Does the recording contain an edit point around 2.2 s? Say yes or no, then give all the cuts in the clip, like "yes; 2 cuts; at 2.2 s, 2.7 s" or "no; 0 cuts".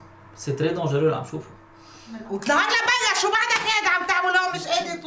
yes; 1 cut; at 2.2 s